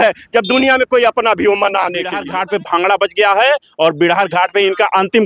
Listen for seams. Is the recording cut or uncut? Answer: cut